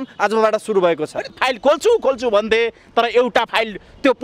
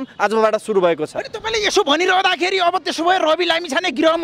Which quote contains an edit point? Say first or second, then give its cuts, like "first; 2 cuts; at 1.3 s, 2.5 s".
first; 1 cut; at 1.4 s